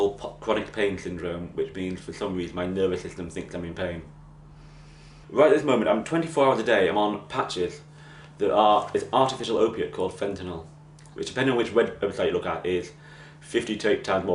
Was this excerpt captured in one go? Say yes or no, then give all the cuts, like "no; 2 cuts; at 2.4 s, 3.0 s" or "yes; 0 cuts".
no; 1 cut; at 9.9 s